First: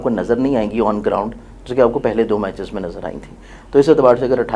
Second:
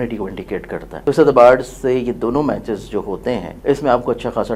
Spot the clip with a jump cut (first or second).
second